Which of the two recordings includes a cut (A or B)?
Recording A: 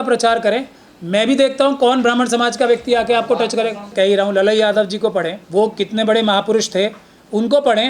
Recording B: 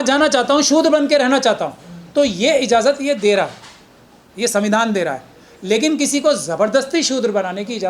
A